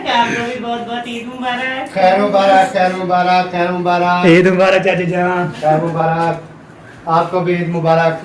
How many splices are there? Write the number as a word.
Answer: zero